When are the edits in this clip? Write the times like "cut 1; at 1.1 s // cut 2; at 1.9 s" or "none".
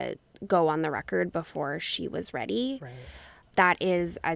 cut 1; at 3.4 s

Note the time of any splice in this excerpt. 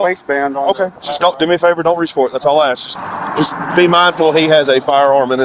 cut 1; at 2.9 s

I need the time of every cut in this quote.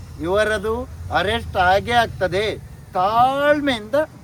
none

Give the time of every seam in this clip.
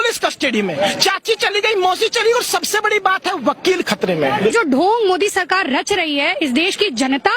cut 1; at 4.5 s

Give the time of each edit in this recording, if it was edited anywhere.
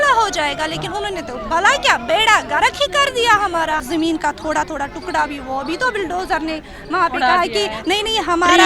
cut 1; at 3.8 s

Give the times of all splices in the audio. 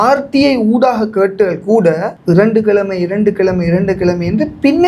none

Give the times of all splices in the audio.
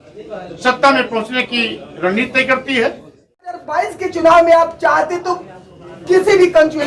cut 1; at 3.6 s

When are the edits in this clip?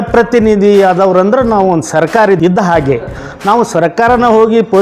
cut 1; at 2.4 s

